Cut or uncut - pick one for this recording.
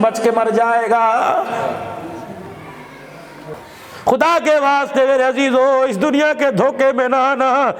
cut